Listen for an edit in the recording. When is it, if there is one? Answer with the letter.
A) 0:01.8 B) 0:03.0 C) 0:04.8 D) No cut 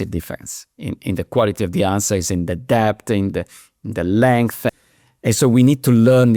C